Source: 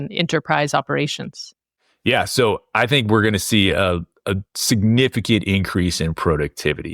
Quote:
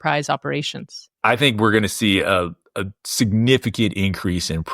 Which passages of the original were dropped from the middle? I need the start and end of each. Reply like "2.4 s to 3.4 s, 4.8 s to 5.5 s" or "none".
1.6 s to 2.6 s